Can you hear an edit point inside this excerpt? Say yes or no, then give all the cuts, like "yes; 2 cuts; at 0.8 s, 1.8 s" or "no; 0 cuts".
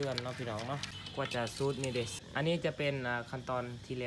yes; 2 cuts; at 1.0 s, 2.2 s